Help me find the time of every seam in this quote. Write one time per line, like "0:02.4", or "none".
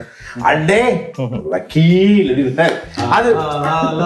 none